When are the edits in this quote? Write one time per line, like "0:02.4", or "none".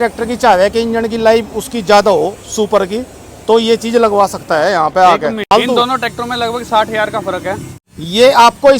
0:05.5
0:07.7